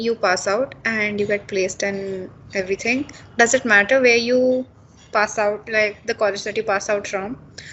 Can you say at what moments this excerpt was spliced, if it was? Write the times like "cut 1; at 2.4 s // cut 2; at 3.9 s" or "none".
none